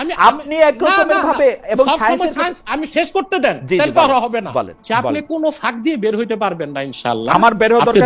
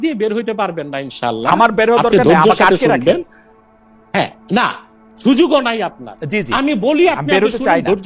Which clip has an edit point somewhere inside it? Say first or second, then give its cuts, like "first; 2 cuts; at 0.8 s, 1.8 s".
first; 1 cut; at 4.8 s